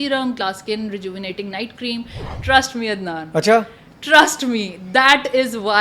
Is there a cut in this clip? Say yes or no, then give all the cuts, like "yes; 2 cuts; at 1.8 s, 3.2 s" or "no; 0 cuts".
yes; 1 cut; at 2.2 s